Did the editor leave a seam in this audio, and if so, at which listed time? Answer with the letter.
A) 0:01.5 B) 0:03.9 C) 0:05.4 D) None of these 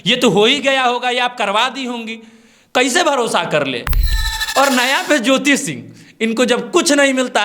B